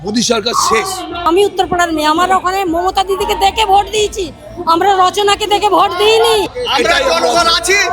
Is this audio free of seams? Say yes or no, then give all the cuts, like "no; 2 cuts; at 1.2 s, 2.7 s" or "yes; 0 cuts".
no; 2 cuts; at 1.2 s, 6.5 s